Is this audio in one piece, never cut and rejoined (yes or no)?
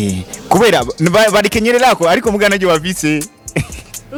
yes